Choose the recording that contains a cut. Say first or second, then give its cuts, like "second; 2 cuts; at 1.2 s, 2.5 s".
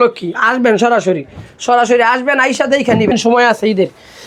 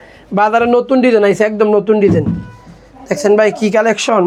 first; 1 cut; at 3.1 s